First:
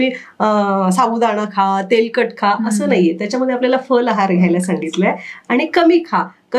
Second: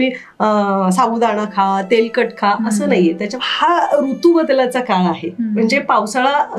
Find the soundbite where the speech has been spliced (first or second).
second